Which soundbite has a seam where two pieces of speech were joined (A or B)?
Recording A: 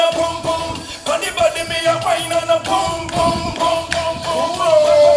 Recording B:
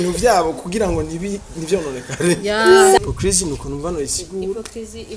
B